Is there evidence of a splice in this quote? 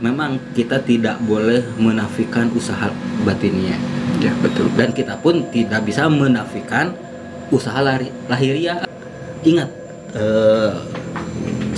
yes; 1 cut; at 9.0 s

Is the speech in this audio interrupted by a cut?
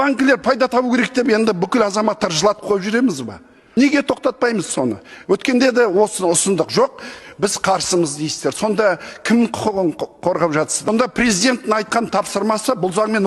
yes; 2 cuts; at 3.6 s, 10.9 s

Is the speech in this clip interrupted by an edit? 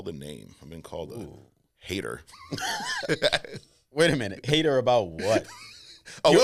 no; 0 cuts

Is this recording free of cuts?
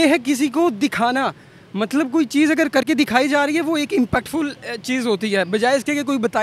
yes; 0 cuts

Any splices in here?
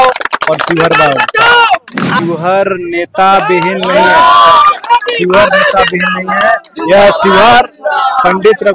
yes; 1 cut; at 2.1 s

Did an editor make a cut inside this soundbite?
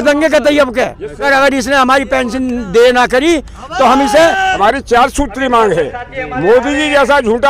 yes; 2 cuts; at 1.2 s, 4.5 s

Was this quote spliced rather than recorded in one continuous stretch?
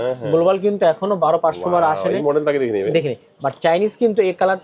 no; 0 cuts

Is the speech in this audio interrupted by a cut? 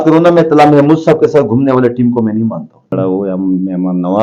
yes; 1 cut; at 2.9 s

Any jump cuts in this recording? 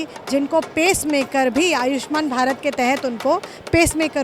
no; 0 cuts

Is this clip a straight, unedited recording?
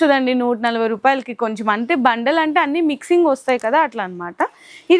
yes; 0 cuts

